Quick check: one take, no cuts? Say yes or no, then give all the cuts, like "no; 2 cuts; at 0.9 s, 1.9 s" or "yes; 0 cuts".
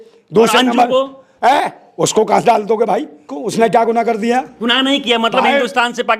no; 1 cut; at 3.4 s